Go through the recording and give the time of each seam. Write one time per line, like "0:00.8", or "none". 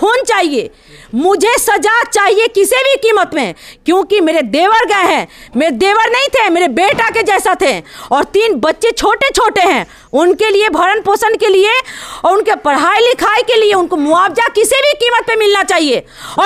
none